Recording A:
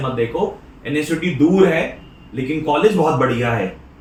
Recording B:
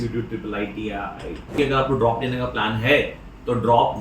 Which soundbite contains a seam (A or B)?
B